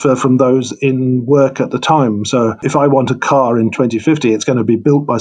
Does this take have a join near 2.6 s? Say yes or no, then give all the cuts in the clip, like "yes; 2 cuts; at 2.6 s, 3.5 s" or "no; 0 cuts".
yes; 1 cut; at 2.6 s